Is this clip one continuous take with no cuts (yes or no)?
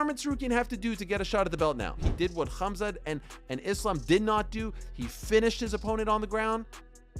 no